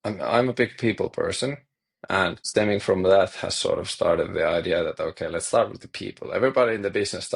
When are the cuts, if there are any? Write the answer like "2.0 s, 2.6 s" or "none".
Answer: 2.4 s